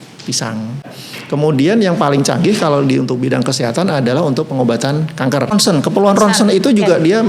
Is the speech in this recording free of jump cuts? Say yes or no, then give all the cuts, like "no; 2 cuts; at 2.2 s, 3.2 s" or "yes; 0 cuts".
no; 2 cuts; at 1.0 s, 5.5 s